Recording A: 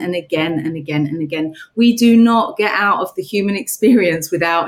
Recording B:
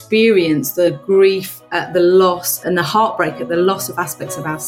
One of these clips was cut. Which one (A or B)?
B